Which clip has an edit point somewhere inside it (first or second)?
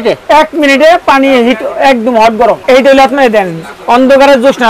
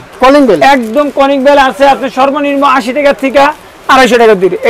first